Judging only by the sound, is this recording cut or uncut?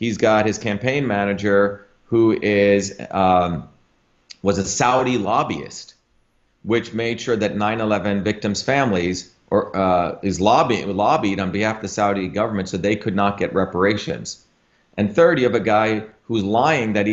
uncut